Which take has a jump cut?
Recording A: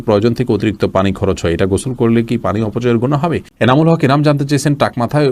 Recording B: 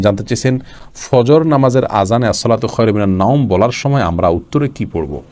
A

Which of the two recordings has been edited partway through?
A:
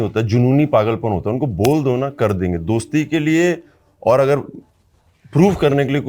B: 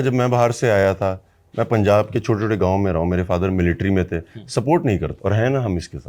B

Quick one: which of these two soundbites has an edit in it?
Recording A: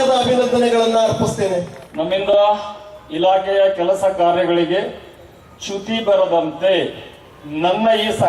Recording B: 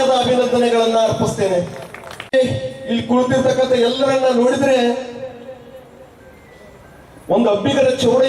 A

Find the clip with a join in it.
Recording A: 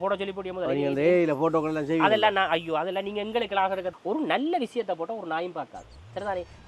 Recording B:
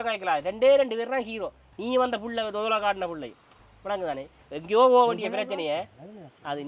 A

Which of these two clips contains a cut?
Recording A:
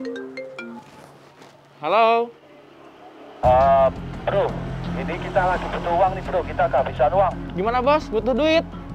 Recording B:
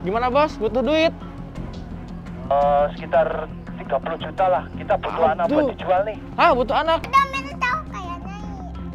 B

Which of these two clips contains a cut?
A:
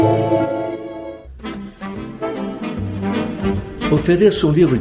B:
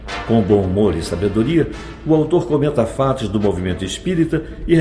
A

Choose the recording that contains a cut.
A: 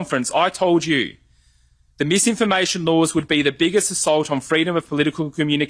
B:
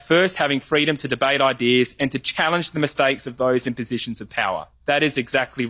B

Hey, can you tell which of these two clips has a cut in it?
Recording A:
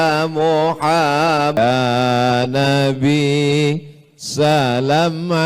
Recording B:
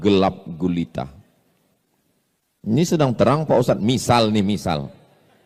A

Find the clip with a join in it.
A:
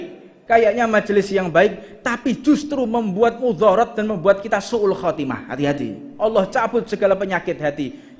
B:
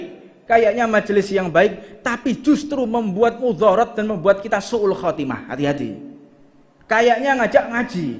A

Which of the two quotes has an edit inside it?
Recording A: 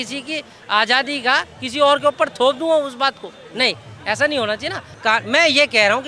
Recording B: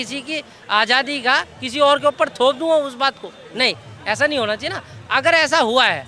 A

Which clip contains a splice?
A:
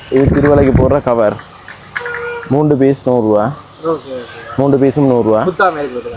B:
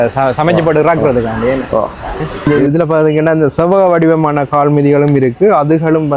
B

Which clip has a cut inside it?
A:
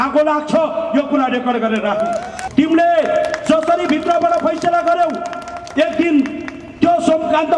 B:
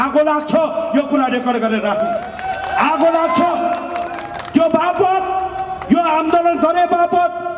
A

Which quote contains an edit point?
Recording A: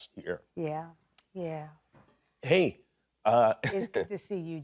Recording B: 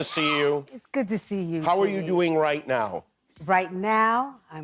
A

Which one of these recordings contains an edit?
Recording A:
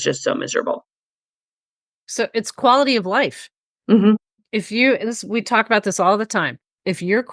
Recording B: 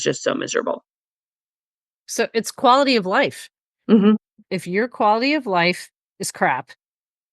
B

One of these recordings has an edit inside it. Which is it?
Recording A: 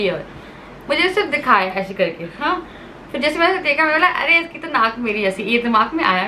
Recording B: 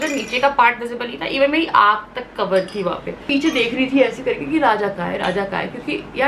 B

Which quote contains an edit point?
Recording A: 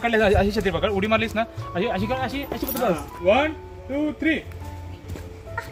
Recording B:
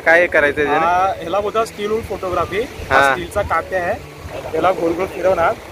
A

